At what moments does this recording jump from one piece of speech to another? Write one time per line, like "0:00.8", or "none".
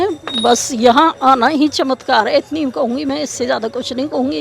none